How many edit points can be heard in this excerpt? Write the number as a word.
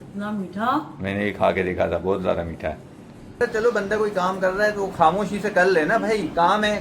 one